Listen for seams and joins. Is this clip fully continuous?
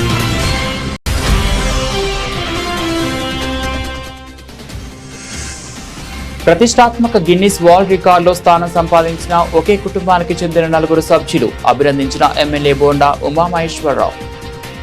no; 1 cut; at 1.0 s

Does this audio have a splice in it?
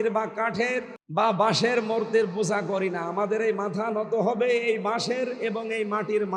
yes; 1 cut; at 1.0 s

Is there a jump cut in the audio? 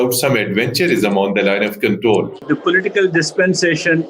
yes; 1 cut; at 2.4 s

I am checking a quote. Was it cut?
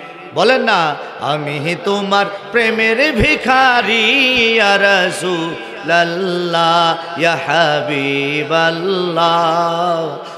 no; 0 cuts

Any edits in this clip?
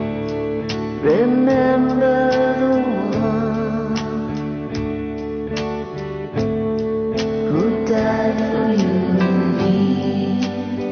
no; 0 cuts

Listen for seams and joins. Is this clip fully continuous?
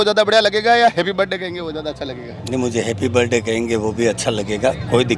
yes; 0 cuts

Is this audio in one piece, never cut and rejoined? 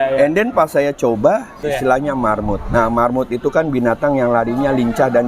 no; 1 cut; at 1.6 s

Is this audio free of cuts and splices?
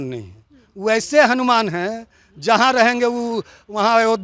yes; 0 cuts

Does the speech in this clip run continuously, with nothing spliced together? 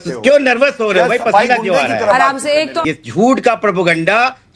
no; 1 cut; at 2.7 s

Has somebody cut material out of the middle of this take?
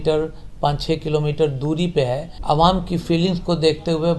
yes; 1 cut; at 2.3 s

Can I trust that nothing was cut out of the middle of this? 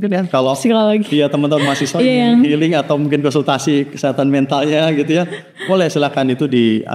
yes; 0 cuts

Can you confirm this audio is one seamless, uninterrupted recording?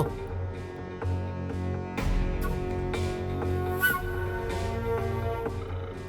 no; 1 cut; at 4.4 s

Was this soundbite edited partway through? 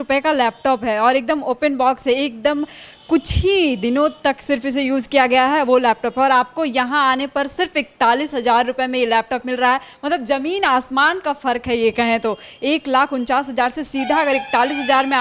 no; 0 cuts

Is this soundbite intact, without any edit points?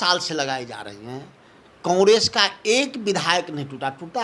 yes; 0 cuts

